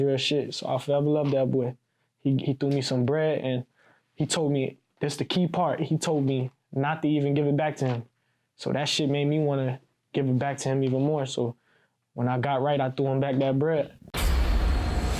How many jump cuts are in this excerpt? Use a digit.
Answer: 1